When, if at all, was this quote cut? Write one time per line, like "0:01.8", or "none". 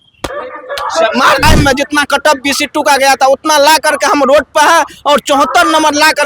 0:01.4